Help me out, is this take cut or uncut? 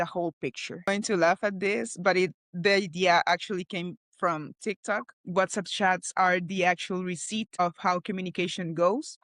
cut